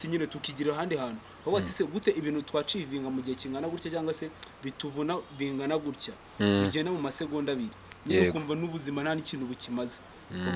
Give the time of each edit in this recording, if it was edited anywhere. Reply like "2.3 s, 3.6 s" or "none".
none